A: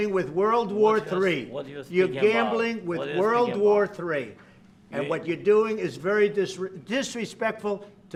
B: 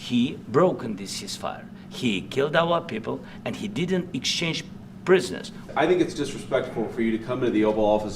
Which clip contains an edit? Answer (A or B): B